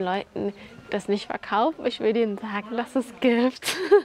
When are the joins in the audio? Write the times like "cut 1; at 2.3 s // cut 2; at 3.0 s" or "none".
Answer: none